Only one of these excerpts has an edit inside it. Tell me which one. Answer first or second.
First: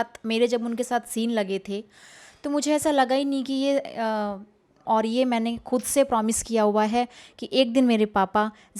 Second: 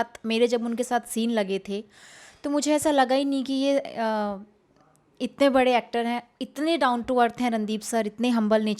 first